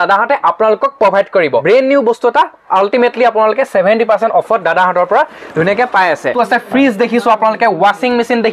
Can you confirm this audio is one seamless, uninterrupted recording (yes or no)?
no